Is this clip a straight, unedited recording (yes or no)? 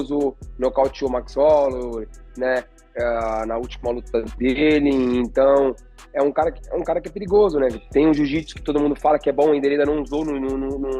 yes